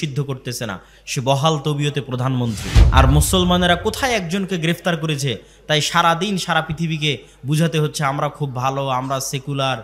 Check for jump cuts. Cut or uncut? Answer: cut